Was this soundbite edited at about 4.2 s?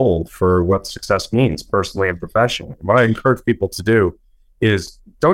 no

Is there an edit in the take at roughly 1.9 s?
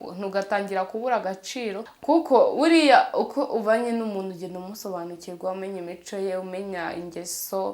yes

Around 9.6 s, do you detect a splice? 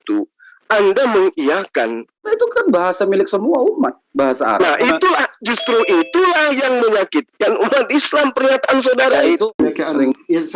yes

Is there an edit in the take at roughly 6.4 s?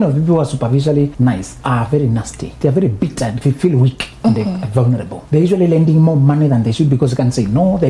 no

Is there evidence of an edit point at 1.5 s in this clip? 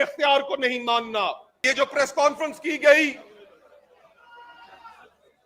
yes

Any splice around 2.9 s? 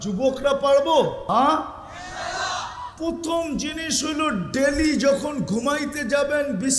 no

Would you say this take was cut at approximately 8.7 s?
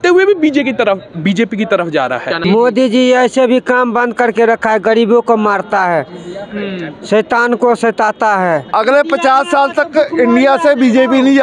yes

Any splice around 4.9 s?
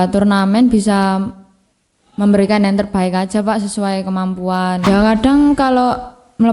yes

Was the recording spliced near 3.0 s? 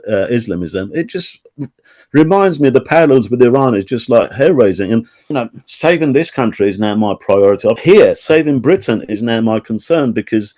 no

